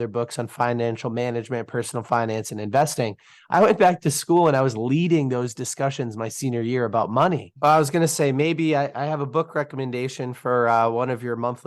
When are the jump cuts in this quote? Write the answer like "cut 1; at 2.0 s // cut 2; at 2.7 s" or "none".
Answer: cut 1; at 7.5 s